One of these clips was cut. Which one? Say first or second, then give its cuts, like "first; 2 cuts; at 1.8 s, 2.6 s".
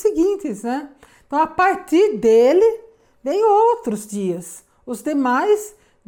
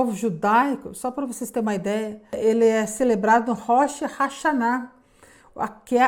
second; 1 cut; at 2.4 s